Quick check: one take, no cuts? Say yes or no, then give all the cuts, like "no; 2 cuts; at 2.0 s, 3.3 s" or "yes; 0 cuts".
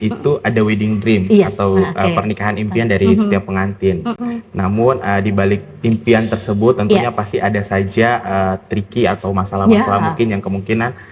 yes; 0 cuts